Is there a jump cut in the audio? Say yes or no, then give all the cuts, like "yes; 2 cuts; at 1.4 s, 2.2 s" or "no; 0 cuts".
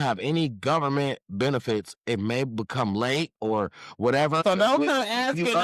yes; 1 cut; at 4.4 s